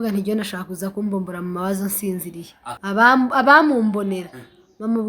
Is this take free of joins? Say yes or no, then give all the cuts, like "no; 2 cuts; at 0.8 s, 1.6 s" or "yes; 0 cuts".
no; 1 cut; at 2.6 s